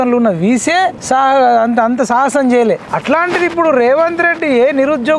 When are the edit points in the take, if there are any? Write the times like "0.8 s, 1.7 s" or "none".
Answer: 1.0 s, 2.9 s